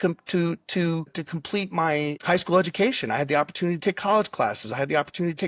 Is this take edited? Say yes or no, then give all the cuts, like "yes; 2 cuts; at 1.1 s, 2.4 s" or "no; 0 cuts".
no; 0 cuts